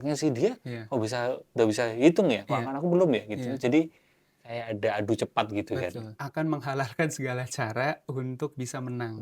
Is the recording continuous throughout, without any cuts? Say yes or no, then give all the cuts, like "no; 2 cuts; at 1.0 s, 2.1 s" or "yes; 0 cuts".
no; 1 cut; at 6.2 s